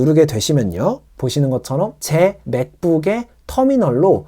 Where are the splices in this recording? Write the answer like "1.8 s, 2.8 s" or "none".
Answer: 2.0 s